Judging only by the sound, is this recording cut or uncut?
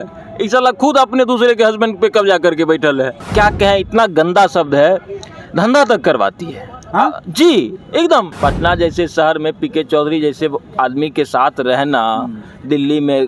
cut